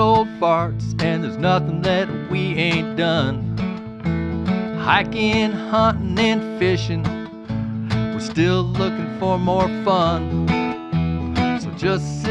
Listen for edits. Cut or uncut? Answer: uncut